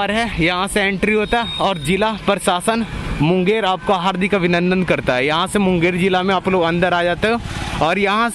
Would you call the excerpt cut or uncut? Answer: uncut